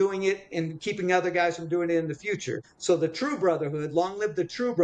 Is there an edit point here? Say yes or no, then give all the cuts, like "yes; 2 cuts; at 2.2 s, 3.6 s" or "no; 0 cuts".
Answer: yes; 1 cut; at 2.7 s